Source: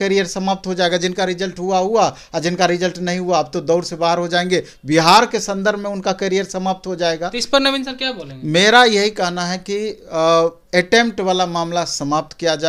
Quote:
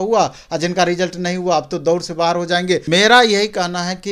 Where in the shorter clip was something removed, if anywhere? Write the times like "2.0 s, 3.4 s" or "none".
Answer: 2.8 s